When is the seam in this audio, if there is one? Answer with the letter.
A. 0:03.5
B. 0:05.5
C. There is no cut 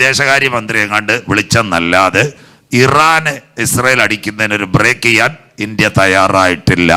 C